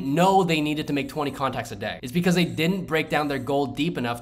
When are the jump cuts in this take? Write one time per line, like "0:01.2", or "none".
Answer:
0:02.0